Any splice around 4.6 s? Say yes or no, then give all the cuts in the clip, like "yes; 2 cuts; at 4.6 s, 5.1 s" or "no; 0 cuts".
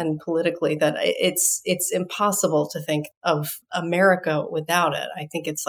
no; 1 cut; at 3.1 s